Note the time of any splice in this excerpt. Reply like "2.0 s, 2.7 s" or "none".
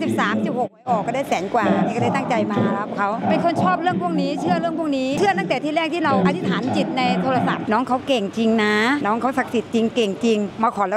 none